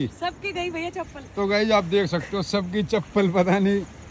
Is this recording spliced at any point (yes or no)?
no